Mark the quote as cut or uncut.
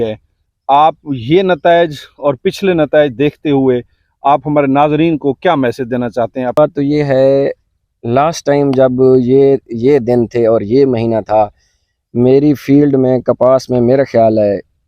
cut